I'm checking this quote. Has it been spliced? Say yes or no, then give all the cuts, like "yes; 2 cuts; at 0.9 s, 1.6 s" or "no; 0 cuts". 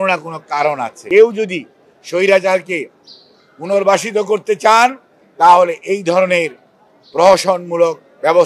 yes; 1 cut; at 0.9 s